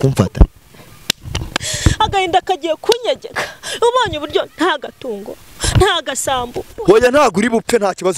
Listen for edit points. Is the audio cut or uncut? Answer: cut